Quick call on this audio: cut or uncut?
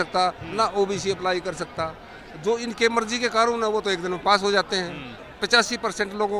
cut